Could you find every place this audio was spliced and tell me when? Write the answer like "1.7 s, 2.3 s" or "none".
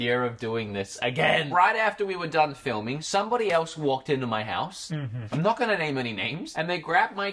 1.5 s